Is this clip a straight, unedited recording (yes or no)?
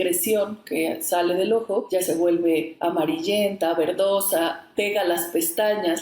yes